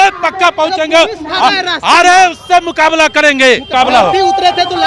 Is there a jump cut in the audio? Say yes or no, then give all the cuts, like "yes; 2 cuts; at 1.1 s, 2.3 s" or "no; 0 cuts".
yes; 1 cut; at 3.7 s